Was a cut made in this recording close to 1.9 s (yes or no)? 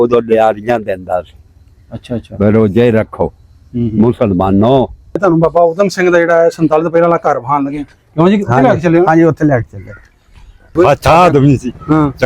no